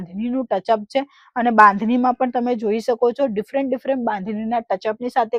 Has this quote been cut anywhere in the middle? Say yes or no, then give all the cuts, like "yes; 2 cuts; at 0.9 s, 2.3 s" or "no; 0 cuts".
no; 0 cuts